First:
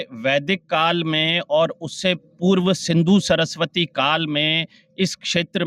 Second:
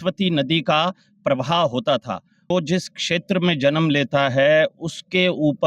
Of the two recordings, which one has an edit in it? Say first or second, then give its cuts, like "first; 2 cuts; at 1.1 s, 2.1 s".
second; 1 cut; at 2.3 s